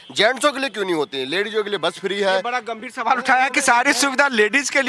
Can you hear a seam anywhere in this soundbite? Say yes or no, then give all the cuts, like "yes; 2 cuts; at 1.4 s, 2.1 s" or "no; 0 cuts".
no; 0 cuts